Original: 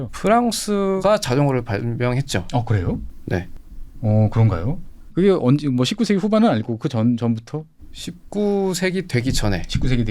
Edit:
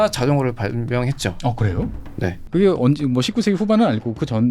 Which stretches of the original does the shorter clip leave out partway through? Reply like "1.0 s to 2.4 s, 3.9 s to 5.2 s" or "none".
3.5 s to 5.0 s